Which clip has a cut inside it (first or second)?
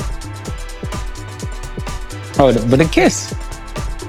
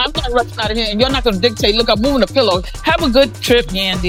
first